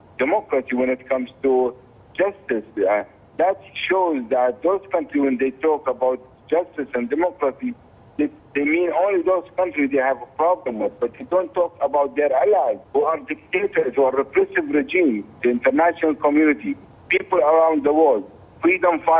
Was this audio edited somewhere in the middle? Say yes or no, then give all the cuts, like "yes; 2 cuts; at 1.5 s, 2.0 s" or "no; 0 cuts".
yes; 1 cut; at 4.2 s